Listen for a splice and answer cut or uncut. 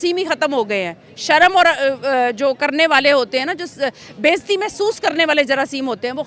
uncut